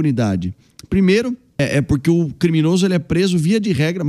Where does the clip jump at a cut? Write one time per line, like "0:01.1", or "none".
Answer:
0:01.6